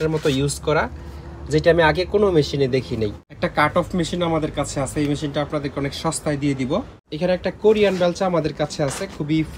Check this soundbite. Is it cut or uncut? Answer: cut